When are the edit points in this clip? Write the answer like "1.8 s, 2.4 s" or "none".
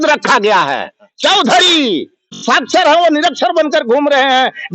2.4 s